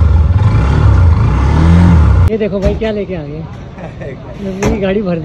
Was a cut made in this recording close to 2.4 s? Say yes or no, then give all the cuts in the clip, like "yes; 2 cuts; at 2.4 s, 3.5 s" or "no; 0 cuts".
yes; 1 cut; at 2.4 s